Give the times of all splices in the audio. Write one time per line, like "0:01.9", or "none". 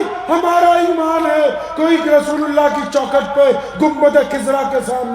none